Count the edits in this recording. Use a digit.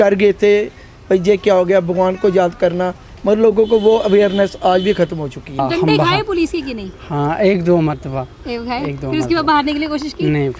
1